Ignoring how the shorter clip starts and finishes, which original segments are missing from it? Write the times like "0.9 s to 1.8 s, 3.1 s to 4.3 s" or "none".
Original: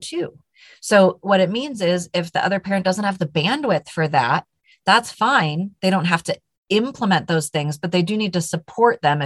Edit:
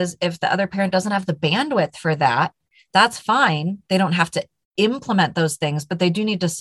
none